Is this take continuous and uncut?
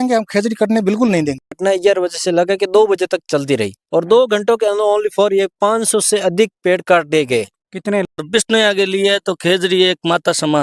no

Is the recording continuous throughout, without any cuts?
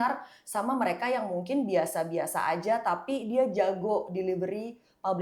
yes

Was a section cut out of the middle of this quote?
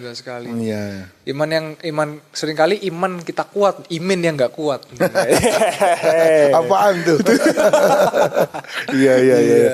no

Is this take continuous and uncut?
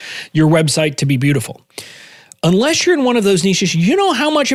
yes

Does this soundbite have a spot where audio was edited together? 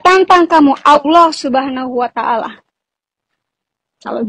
no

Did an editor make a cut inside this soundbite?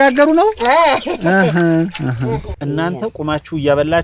yes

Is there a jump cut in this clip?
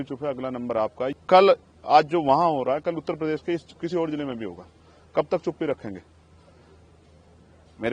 yes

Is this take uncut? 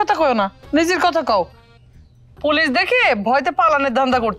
yes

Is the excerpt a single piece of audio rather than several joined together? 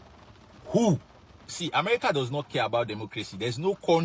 no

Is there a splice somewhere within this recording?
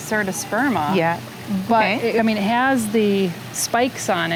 no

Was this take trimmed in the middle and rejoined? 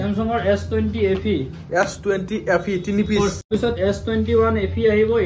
yes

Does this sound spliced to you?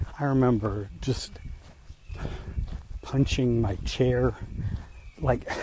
no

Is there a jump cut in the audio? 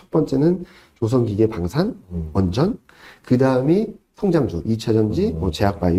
no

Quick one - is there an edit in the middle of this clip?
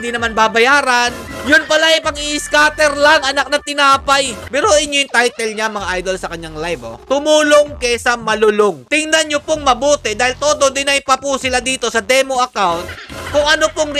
yes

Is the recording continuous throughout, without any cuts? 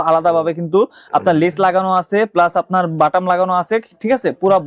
yes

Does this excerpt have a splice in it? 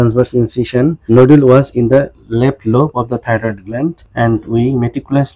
yes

